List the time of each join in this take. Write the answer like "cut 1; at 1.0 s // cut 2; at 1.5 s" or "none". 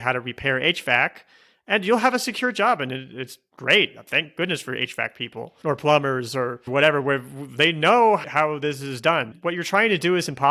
cut 1; at 9.3 s